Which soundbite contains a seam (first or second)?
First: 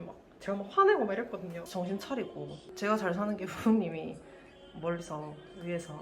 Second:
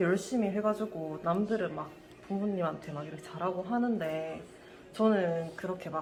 first